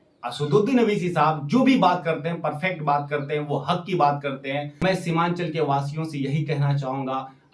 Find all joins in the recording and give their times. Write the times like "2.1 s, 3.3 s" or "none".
4.8 s